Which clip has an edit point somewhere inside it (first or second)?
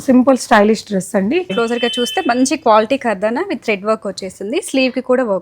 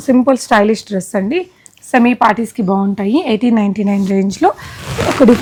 first